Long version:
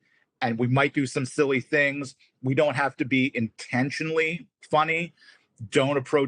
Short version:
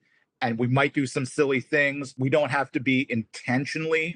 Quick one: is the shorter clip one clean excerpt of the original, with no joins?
no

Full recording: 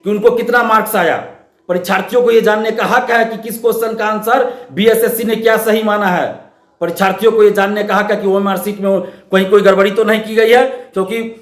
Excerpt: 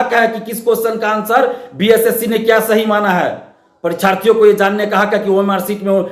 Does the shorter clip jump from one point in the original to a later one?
no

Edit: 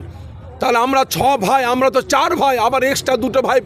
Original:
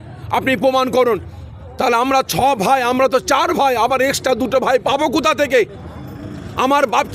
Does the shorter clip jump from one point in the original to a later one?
no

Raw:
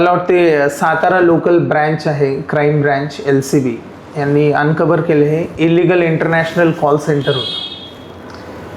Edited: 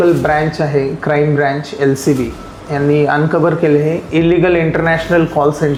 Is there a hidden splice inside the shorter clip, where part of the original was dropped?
no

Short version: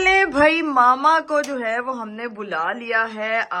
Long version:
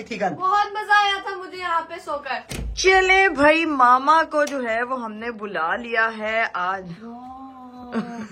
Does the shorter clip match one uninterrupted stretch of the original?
yes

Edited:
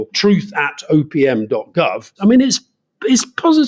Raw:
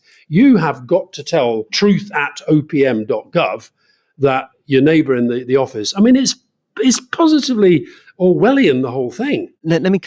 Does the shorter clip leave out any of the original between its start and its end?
yes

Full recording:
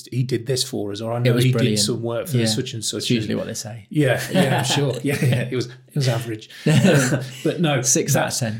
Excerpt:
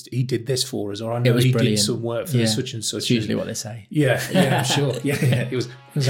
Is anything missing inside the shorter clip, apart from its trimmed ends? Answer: no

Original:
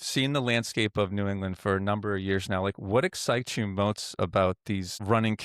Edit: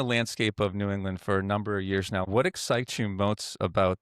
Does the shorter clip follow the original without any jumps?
no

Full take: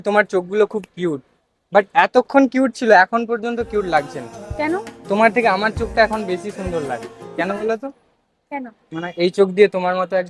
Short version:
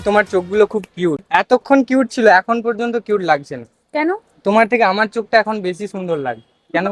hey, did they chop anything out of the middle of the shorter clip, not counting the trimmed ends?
yes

